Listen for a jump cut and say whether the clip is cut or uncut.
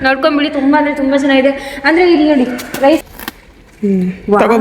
cut